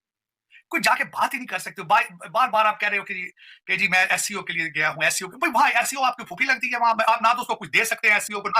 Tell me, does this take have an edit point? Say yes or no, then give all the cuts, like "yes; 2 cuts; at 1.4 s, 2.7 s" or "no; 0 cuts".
no; 0 cuts